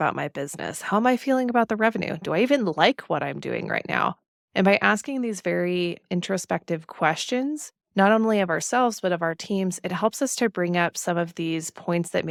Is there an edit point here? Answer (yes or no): no